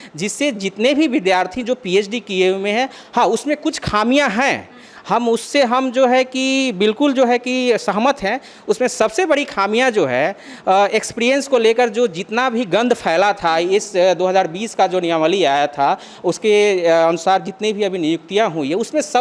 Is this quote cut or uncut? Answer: uncut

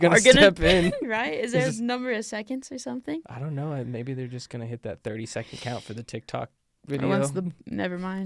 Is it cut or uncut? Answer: uncut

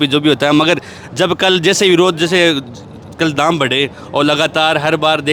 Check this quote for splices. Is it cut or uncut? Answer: uncut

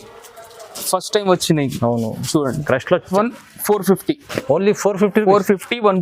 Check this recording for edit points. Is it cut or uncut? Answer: cut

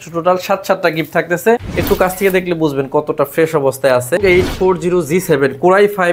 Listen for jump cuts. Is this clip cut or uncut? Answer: cut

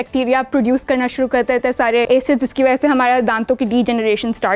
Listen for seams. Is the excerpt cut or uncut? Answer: cut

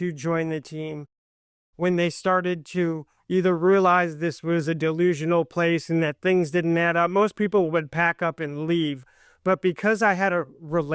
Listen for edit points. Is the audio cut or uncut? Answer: cut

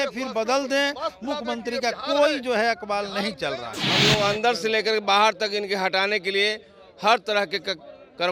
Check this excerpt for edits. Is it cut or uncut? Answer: cut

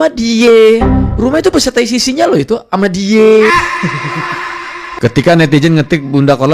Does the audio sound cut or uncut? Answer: cut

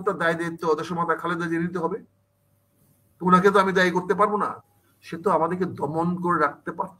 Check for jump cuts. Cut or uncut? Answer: cut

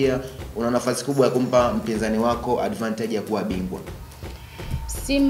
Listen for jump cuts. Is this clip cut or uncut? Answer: uncut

